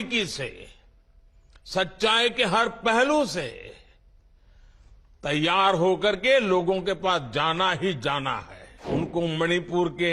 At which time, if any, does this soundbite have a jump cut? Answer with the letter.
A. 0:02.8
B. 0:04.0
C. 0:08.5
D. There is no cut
C